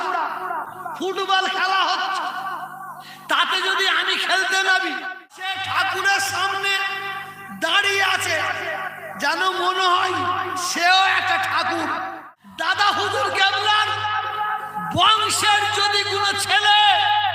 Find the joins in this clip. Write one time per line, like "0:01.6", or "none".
0:05.4
0:12.2

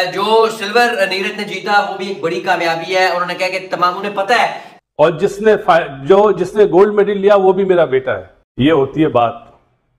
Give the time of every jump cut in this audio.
0:04.6

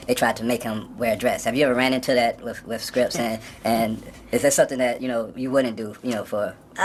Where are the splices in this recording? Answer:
none

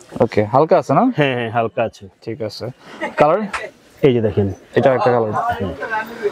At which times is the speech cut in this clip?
none

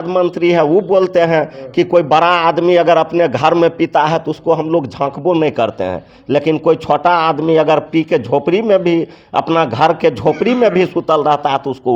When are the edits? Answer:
none

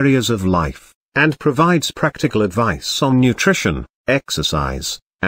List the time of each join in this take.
none

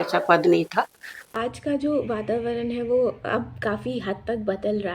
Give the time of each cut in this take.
0:01.3

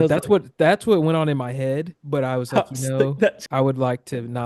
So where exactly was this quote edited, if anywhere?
0:03.4

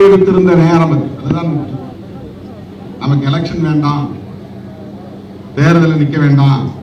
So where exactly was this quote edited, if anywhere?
none

